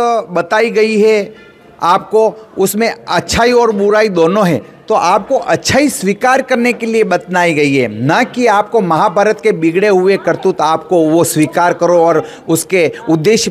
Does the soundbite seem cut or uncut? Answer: uncut